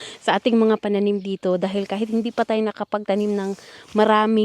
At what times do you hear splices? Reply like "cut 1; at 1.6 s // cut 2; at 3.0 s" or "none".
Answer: none